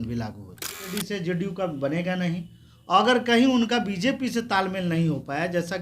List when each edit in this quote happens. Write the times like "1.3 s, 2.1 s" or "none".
0.9 s